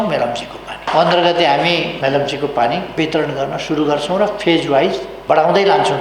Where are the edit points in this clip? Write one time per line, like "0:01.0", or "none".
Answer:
0:00.9
0:01.9
0:02.9
0:05.1